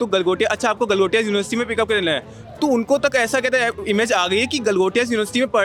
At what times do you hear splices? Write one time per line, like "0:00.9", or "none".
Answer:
none